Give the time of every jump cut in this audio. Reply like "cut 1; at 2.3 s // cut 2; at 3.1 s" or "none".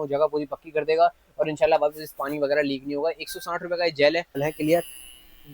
cut 1; at 4.4 s